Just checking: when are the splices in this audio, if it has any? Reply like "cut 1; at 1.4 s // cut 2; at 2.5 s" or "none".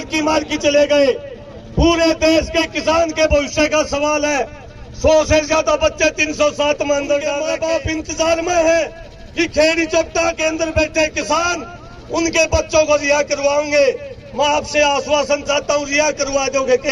cut 1; at 7.5 s